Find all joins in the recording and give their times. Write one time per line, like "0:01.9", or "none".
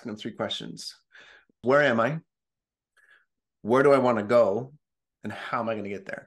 0:01.5